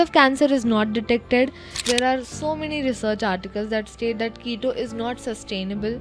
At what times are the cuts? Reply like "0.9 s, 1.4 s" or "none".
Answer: 1.8 s